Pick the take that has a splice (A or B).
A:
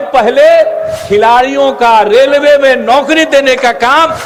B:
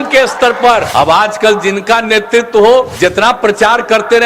B